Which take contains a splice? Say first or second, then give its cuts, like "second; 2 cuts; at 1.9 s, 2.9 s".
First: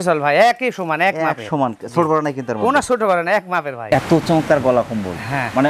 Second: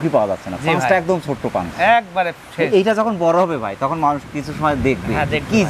first; 1 cut; at 3.8 s